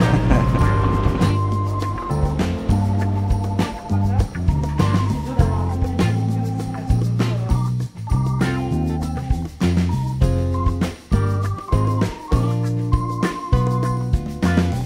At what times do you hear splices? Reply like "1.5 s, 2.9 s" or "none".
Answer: 4.8 s